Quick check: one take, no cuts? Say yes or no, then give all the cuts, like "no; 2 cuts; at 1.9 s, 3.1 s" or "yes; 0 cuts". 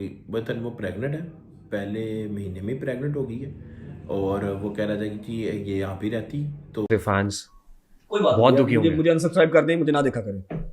no; 1 cut; at 6.9 s